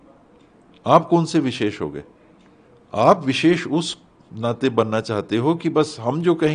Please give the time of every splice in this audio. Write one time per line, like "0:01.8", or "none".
none